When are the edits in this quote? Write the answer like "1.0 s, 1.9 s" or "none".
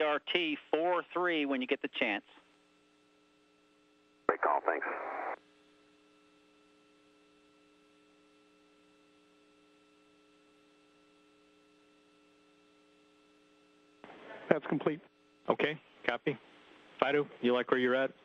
none